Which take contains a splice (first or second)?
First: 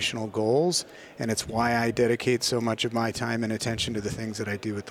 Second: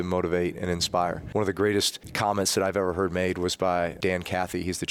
second